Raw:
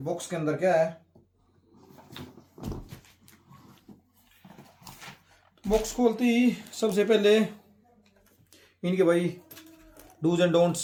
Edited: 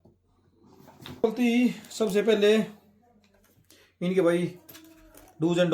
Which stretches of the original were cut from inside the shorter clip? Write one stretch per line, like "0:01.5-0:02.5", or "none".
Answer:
0:02.3-0:06.1